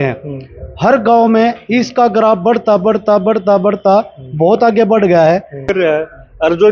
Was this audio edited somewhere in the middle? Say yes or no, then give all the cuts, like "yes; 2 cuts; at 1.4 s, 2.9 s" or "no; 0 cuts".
yes; 1 cut; at 5.7 s